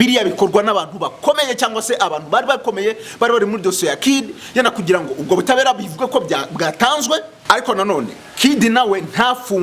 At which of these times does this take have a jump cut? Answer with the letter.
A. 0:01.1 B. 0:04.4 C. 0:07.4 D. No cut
C